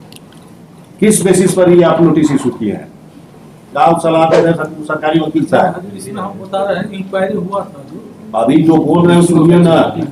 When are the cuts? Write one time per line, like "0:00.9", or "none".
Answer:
0:03.7